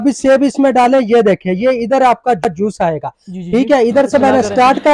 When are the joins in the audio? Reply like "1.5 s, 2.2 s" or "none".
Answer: none